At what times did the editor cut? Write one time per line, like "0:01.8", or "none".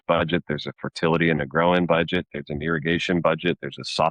none